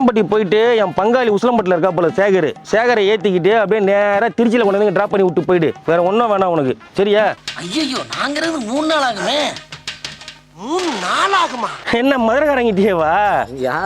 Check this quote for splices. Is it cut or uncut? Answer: cut